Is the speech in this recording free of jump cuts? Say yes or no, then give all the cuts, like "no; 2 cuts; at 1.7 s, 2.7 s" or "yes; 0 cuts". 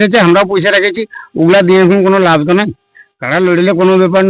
yes; 0 cuts